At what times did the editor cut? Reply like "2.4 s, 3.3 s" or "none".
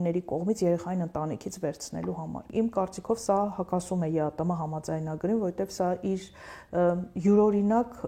2.5 s

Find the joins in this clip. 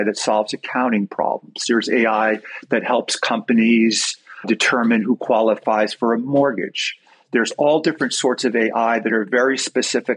4.4 s

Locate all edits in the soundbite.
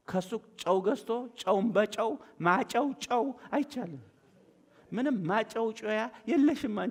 none

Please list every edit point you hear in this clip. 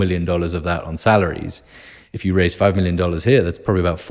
none

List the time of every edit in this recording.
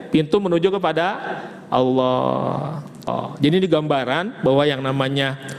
3.1 s

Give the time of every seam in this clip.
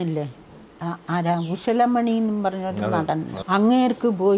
3.3 s

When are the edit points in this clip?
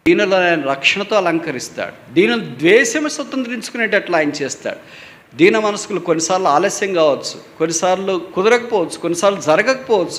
none

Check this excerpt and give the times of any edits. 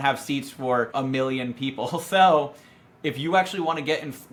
none

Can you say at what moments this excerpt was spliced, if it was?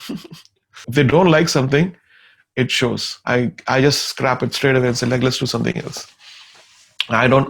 0.8 s, 3.1 s

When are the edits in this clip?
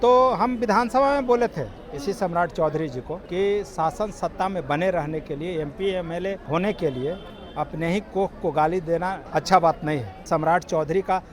3.2 s, 6.4 s, 9.2 s, 10.2 s

